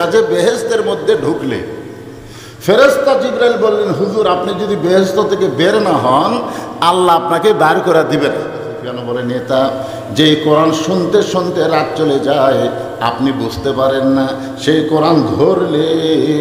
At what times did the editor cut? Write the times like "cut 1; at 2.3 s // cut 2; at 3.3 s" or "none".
cut 1; at 9.0 s